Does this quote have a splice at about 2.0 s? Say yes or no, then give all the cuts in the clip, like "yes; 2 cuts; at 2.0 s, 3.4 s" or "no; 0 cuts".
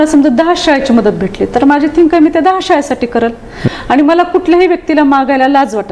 no; 1 cut; at 3.7 s